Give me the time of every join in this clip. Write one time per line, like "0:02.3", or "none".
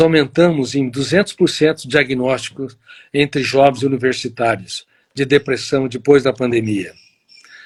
none